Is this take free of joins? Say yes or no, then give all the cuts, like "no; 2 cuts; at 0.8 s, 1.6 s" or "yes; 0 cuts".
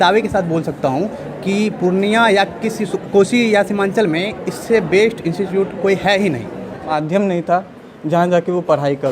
no; 1 cut; at 6.9 s